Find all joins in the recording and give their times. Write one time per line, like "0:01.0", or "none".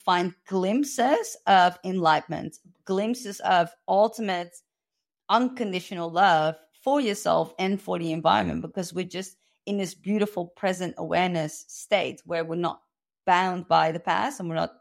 none